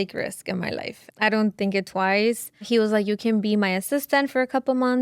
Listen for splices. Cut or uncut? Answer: cut